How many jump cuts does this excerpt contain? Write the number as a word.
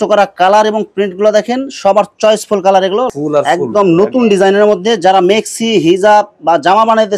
one